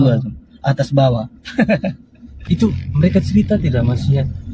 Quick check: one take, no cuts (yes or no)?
no